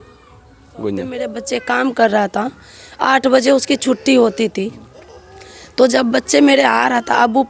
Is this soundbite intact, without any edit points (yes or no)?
no